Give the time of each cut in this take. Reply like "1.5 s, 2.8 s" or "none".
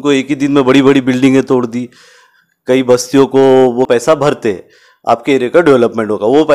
3.9 s